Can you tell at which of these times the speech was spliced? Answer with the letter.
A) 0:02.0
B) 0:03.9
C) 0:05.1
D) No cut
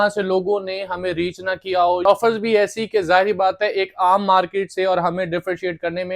A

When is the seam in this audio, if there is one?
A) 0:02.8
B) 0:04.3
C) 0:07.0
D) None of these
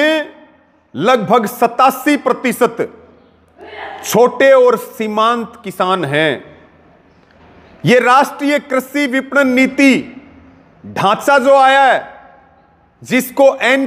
D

